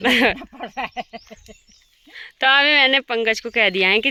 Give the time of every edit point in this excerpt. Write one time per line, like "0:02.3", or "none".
none